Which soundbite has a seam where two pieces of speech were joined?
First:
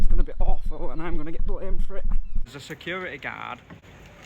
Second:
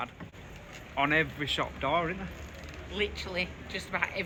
first; 1 cut; at 2.5 s

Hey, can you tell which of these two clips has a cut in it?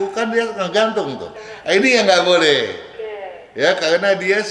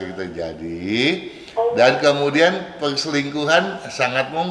first; 1 cut; at 1.3 s

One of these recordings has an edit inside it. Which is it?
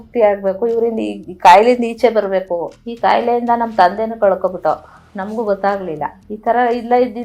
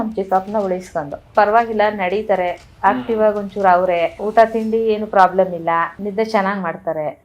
second; 2 cuts; at 1.3 s, 6.0 s

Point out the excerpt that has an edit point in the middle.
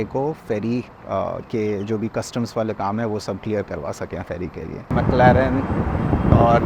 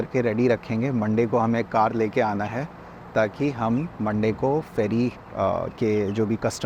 first; 1 cut; at 4.8 s

